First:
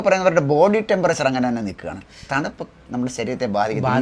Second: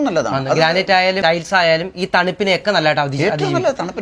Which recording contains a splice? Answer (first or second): second